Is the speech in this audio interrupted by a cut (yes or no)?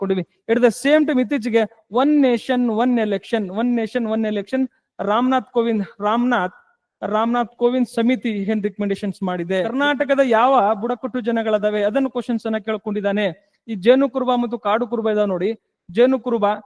yes